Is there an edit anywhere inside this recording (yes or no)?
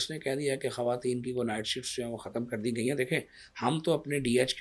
no